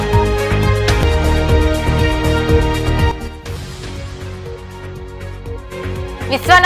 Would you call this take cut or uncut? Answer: uncut